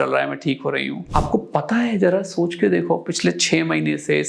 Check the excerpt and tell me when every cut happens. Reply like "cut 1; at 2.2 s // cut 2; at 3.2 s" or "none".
cut 1; at 1.0 s